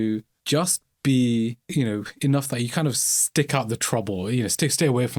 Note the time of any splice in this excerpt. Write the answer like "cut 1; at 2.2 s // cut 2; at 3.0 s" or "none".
none

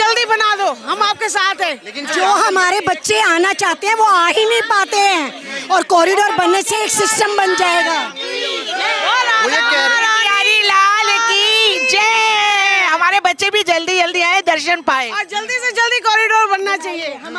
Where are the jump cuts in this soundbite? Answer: none

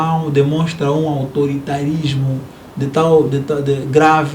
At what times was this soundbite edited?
none

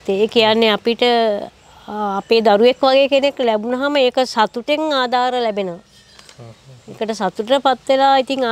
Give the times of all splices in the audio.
none

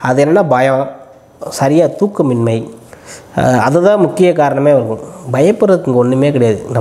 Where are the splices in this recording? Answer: none

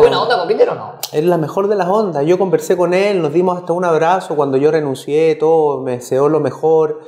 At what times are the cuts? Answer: none

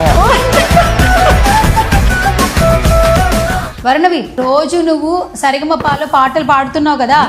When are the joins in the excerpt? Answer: none

